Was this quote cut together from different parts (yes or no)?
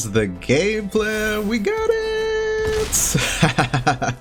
no